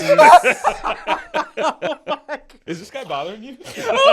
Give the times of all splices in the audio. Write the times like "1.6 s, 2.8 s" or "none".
2.6 s